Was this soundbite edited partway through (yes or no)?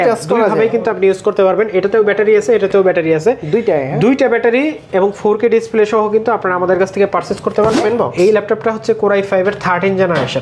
yes